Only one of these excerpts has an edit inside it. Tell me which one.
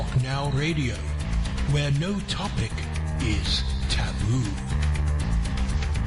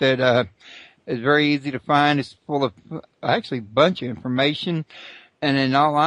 second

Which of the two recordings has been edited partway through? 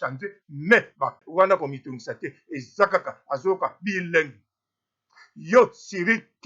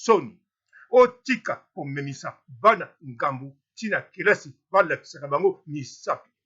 first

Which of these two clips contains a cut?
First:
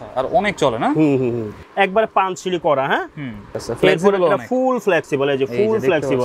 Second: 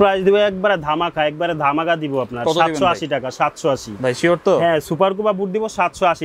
first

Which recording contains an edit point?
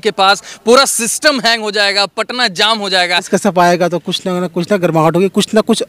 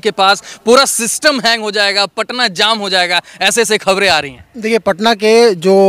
first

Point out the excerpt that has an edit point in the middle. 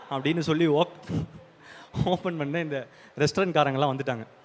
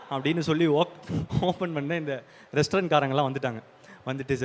second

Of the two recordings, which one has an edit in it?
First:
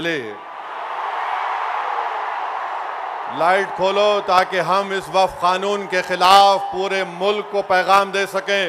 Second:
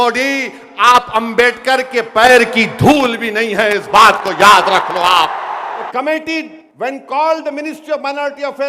second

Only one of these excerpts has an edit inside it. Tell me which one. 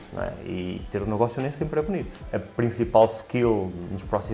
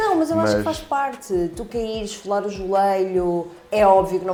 first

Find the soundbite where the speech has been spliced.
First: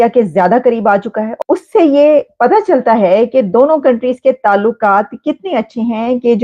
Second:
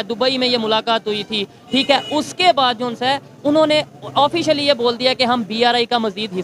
first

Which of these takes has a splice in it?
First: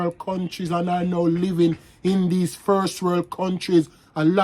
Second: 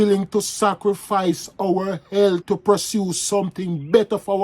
second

